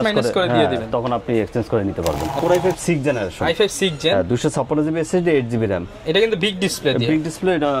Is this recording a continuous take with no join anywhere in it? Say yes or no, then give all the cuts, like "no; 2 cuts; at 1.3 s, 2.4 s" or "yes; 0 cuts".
no; 1 cut; at 2.4 s